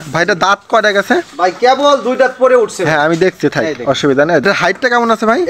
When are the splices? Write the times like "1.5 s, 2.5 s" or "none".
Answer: 4.4 s